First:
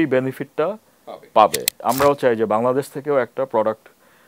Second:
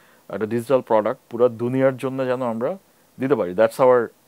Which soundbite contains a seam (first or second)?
first